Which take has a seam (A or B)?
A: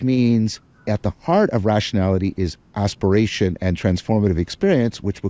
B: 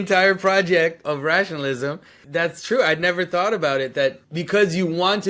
B